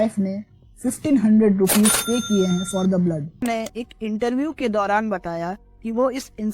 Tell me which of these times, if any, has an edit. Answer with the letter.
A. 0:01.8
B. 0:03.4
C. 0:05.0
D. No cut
B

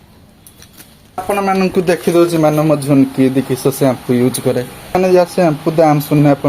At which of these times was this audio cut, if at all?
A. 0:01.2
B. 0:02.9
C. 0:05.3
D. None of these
A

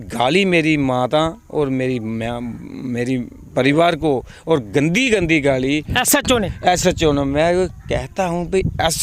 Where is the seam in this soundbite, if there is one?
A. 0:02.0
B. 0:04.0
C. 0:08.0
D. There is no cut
D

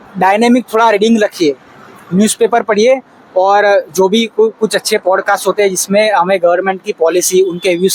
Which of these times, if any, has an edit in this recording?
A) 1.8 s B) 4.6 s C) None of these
C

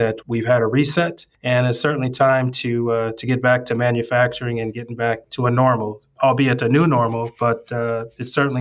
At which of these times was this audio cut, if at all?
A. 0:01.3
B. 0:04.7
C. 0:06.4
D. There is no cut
A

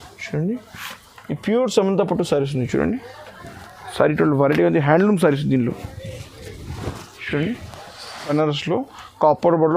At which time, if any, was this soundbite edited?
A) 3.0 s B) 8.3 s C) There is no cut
B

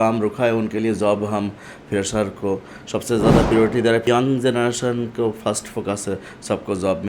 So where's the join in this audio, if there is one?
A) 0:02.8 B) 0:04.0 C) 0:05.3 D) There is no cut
B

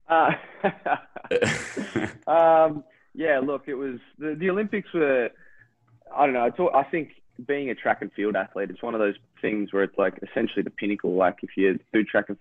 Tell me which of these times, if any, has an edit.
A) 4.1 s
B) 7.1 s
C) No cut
C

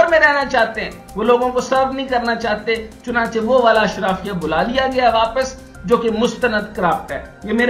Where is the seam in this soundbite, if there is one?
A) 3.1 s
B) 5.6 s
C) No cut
C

